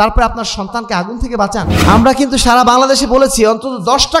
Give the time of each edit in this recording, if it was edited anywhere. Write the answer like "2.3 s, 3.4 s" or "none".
1.7 s